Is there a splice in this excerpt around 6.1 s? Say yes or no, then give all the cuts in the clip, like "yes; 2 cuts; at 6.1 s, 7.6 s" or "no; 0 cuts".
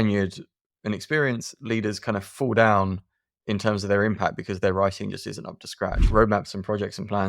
yes; 1 cut; at 6.1 s